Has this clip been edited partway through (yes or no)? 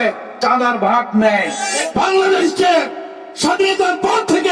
yes